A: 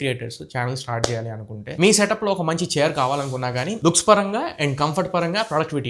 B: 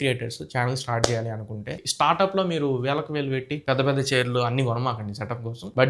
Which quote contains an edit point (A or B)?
B